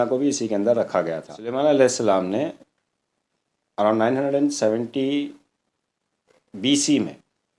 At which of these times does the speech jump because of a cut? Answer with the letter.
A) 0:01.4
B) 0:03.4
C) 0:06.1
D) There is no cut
A